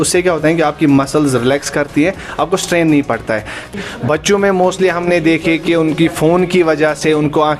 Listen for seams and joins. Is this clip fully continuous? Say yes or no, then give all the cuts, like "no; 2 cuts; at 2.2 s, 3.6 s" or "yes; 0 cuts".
no; 1 cut; at 3.7 s